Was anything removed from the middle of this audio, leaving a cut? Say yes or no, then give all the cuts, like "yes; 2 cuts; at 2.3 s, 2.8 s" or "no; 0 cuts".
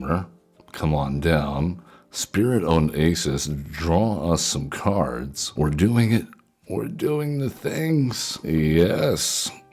yes; 2 cuts; at 5.4 s, 8.3 s